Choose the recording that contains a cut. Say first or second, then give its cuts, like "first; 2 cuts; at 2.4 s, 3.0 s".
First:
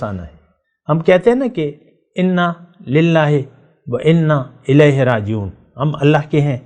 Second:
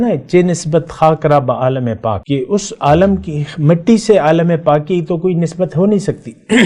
second; 1 cut; at 2.2 s